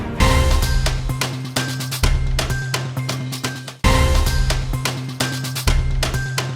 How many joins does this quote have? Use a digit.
1